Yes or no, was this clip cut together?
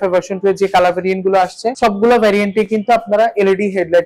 no